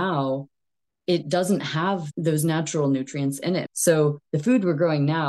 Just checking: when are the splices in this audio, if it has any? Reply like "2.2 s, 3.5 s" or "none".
2.1 s, 3.7 s